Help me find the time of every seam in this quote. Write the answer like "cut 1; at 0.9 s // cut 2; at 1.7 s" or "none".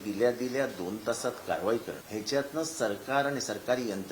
cut 1; at 2.0 s